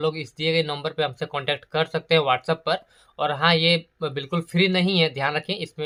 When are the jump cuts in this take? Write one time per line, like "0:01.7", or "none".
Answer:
none